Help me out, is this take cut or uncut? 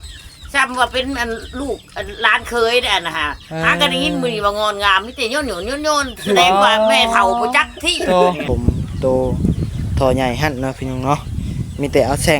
cut